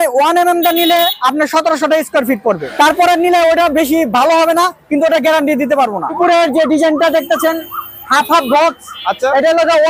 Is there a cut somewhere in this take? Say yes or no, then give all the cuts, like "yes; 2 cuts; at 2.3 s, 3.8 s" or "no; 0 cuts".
yes; 2 cuts; at 2.7 s, 6.1 s